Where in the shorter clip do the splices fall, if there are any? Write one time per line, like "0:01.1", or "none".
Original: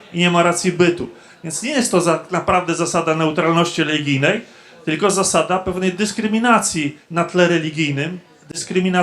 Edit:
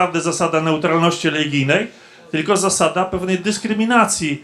none